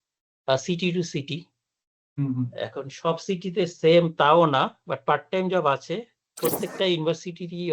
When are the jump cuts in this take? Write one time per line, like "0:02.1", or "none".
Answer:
0:06.2